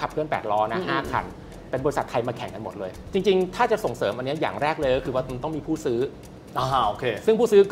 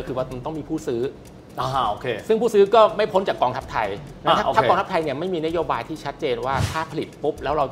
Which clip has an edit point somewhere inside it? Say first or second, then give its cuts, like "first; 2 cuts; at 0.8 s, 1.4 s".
first; 1 cut; at 2.9 s